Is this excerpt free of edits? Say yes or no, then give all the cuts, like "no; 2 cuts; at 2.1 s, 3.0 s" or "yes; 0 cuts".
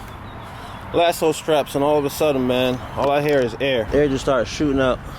no; 1 cut; at 3.9 s